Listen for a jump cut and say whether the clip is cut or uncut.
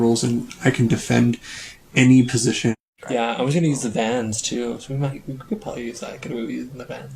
cut